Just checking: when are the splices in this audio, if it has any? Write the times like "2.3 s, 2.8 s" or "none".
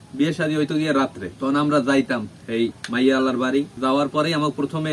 3.7 s